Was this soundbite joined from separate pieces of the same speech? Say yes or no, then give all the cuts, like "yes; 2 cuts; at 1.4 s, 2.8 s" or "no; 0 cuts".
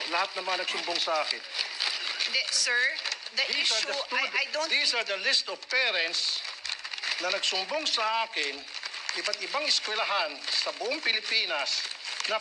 no; 0 cuts